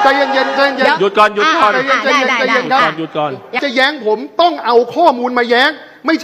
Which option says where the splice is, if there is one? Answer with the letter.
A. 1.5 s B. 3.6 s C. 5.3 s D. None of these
B